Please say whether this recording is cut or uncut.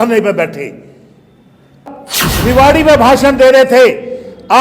cut